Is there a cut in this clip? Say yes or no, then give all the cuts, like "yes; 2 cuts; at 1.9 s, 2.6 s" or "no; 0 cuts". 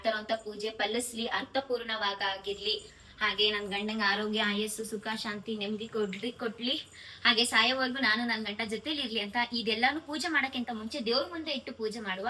no; 0 cuts